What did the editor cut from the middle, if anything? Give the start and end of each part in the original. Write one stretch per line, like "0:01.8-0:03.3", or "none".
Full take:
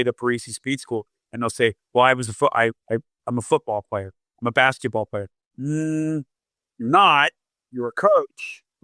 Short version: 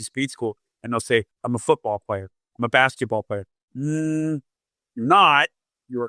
0:01.8-0:03.2